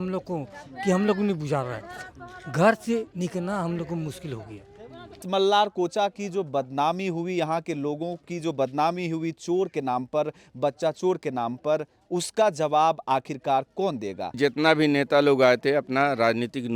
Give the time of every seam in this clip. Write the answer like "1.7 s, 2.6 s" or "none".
5.2 s, 14.4 s